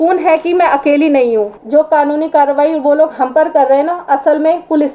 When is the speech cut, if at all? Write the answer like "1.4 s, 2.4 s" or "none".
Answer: 1.6 s